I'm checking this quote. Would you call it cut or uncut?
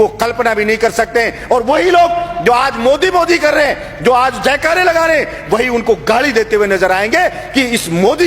uncut